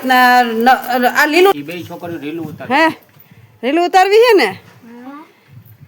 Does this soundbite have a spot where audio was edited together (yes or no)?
yes